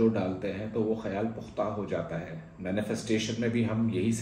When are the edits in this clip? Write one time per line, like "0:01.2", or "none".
none